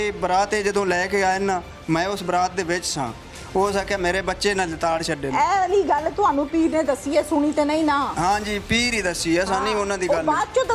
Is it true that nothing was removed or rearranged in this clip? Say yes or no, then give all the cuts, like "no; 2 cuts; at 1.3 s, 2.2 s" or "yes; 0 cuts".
yes; 0 cuts